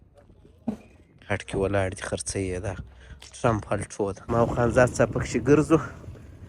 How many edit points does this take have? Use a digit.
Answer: 2